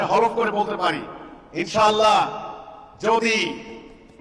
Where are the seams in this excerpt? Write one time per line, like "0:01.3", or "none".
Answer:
none